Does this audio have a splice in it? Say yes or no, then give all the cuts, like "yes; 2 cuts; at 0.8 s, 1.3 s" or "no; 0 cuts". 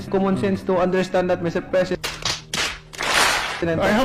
no; 0 cuts